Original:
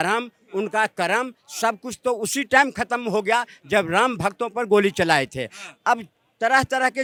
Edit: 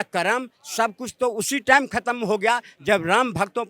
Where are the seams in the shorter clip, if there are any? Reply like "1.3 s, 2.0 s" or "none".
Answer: none